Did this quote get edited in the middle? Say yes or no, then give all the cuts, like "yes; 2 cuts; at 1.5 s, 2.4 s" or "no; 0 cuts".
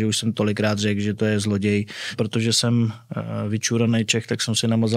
yes; 1 cut; at 2.1 s